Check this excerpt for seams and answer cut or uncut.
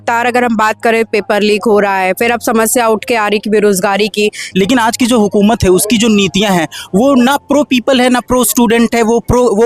cut